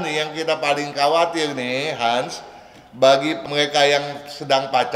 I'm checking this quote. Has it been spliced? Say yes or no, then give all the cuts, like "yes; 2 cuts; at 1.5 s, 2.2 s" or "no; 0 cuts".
yes; 1 cut; at 3.4 s